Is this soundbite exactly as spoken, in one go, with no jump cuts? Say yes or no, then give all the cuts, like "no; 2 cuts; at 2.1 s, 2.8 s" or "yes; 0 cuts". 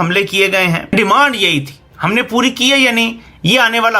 no; 1 cut; at 0.9 s